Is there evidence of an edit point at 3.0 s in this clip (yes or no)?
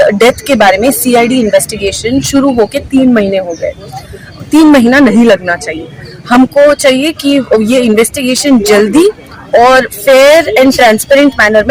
no